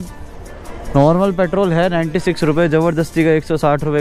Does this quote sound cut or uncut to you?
uncut